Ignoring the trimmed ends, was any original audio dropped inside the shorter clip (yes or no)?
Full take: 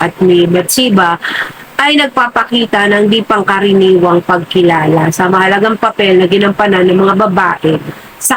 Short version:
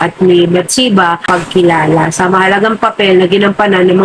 yes